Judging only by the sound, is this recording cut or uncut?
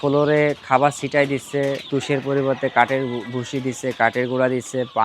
cut